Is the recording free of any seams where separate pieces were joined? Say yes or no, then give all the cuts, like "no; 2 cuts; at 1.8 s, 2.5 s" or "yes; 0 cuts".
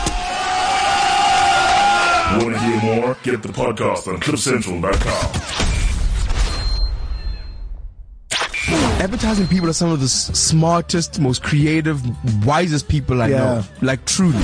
no; 1 cut; at 8.0 s